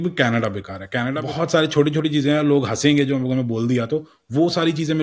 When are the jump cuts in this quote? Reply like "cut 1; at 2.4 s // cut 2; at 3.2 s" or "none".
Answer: cut 1; at 1.1 s